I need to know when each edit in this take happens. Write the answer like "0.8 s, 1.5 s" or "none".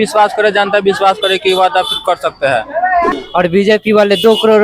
3.1 s